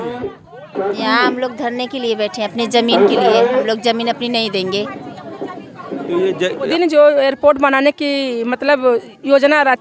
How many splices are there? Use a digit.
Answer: 1